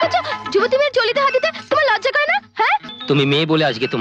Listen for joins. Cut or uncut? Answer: cut